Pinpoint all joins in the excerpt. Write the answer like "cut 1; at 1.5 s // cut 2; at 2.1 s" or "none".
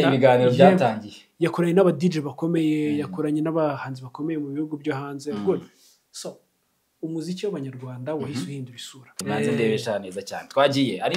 cut 1; at 9.2 s

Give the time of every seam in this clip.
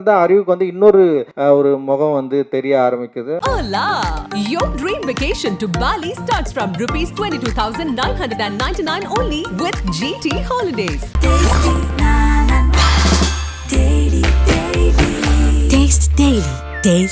cut 1; at 1.3 s // cut 2; at 3.4 s

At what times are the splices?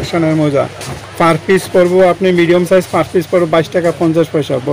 none

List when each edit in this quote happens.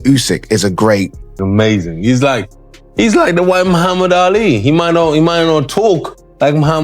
cut 1; at 1.3 s

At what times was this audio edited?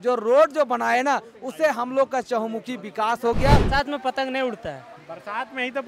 cut 1; at 3.6 s

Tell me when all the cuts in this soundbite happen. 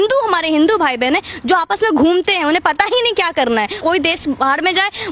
cut 1; at 3.8 s

